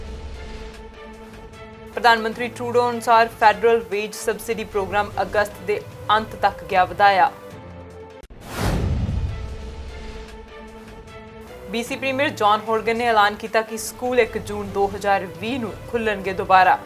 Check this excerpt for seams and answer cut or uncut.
cut